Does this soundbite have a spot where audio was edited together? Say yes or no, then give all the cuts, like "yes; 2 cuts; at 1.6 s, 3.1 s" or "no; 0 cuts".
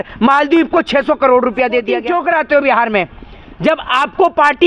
yes; 1 cut; at 2.0 s